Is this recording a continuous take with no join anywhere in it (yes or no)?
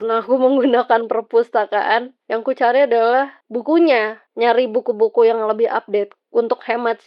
yes